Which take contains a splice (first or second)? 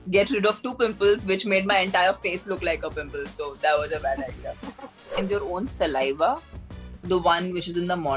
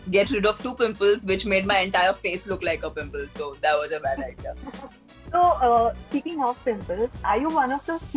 first